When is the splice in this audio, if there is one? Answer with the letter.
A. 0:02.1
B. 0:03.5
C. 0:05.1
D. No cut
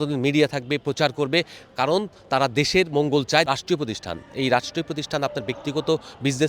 B